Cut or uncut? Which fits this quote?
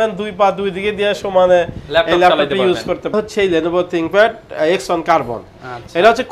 cut